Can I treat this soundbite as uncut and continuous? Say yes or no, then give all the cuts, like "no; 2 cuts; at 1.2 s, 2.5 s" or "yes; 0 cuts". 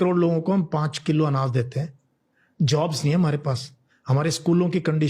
yes; 0 cuts